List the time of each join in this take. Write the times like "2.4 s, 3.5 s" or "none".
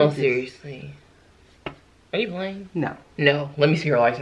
3.0 s